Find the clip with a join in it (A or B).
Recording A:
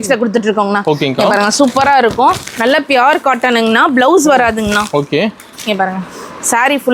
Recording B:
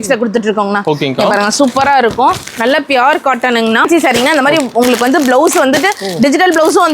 B